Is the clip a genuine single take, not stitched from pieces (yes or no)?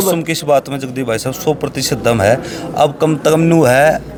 yes